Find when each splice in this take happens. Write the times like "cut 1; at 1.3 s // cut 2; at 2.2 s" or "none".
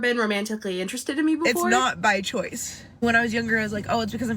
cut 1; at 1.6 s

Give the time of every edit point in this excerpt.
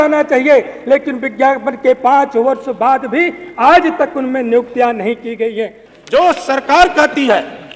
cut 1; at 5.8 s

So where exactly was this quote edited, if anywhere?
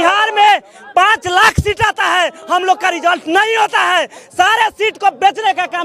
none

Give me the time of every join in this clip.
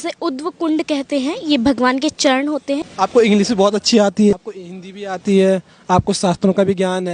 cut 1; at 2.9 s // cut 2; at 4.3 s

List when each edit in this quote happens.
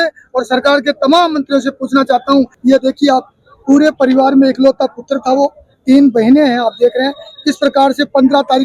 cut 1; at 2.5 s

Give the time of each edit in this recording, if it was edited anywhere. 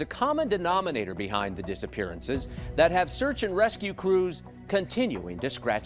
none

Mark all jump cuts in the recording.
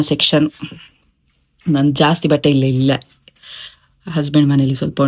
none

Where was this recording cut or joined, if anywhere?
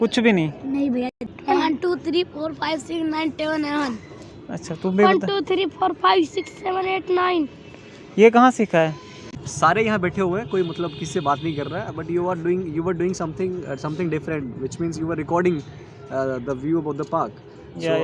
cut 1; at 1.2 s // cut 2; at 9.4 s

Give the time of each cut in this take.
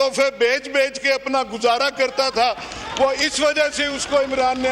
none

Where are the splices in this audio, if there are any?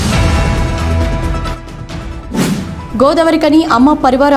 none

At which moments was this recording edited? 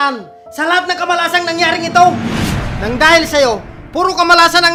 none

